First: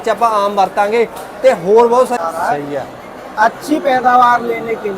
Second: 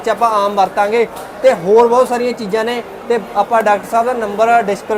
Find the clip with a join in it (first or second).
first